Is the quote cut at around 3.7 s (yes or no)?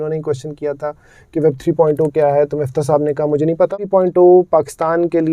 yes